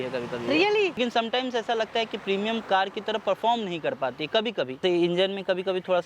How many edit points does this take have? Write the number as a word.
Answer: two